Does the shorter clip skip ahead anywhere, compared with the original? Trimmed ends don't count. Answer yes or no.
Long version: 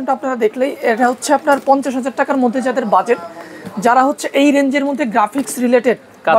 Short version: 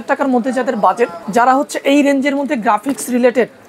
yes